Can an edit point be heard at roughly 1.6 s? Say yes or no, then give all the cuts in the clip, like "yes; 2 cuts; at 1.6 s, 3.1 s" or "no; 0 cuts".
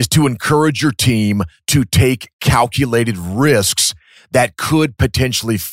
yes; 1 cut; at 1.6 s